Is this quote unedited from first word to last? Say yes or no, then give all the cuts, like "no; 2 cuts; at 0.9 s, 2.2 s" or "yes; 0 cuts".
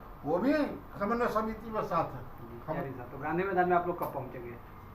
no; 1 cut; at 2.8 s